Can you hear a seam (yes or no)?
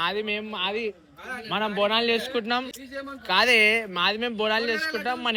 no